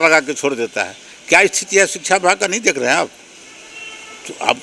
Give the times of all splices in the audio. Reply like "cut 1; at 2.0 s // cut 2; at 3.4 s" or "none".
none